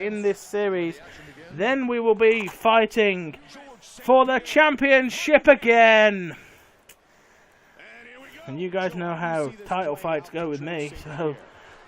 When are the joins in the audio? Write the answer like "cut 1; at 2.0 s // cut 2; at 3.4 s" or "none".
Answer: cut 1; at 6.3 s